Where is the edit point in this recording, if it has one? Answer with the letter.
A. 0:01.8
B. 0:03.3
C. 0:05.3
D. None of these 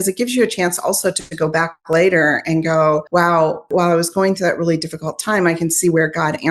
B